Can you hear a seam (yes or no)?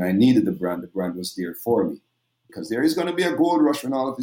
yes